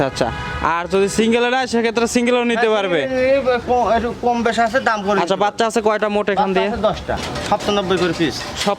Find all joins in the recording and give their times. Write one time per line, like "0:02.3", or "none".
0:07.2